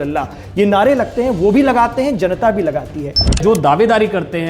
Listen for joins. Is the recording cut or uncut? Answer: cut